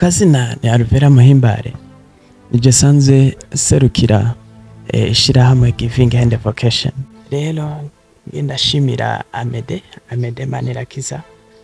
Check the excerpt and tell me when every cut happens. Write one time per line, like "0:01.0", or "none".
0:07.1